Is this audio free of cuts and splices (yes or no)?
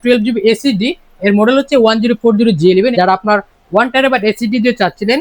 no